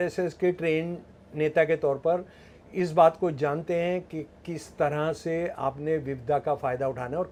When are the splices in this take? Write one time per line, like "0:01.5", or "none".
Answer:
none